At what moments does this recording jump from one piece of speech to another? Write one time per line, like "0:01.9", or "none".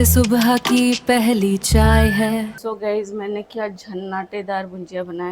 0:02.6